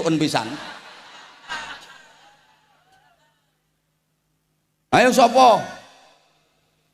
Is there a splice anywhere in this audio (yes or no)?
yes